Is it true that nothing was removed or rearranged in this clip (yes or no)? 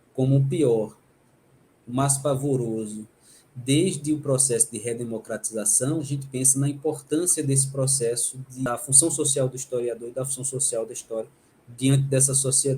no